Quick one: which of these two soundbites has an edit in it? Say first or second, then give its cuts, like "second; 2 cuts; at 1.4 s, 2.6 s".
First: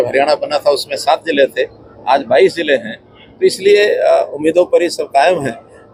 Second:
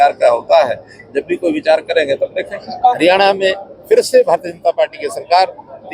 second; 1 cut; at 3.0 s